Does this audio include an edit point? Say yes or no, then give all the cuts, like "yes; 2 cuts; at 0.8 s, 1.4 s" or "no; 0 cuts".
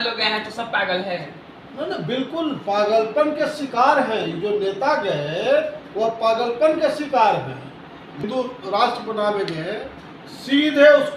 yes; 1 cut; at 8.2 s